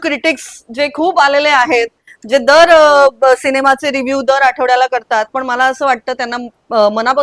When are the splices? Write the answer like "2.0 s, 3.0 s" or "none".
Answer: none

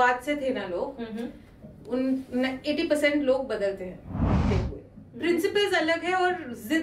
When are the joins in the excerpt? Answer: 4.4 s

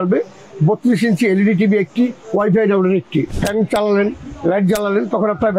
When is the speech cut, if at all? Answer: 3.3 s

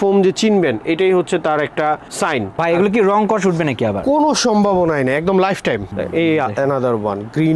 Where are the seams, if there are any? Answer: 2.6 s, 5.9 s

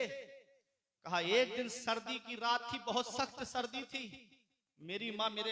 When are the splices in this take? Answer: none

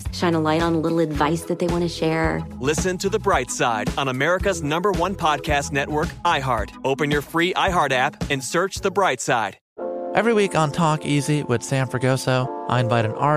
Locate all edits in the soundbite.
9.6 s

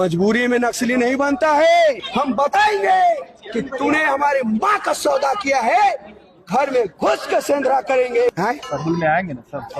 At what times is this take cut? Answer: 2.1 s, 8.3 s

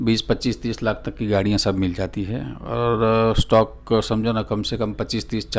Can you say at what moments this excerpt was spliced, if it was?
none

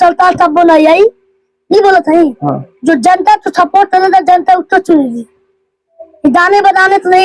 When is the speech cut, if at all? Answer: none

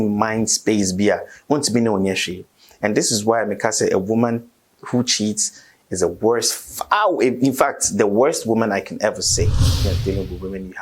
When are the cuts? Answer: 9.9 s

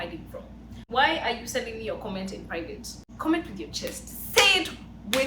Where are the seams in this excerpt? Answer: 0.8 s, 3.0 s

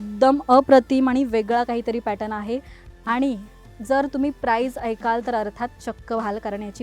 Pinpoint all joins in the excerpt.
none

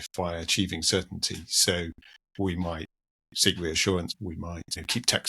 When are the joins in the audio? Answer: 4.1 s

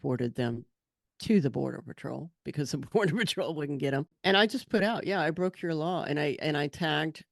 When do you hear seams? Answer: 4.1 s

